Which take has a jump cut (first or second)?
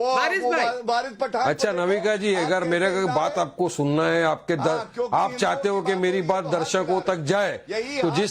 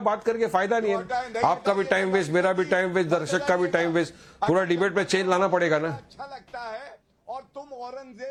first